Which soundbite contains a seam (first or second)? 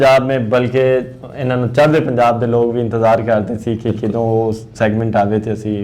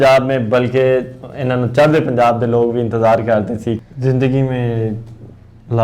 second